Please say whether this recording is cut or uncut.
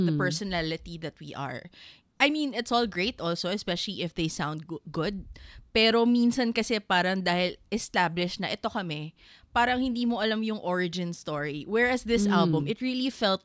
uncut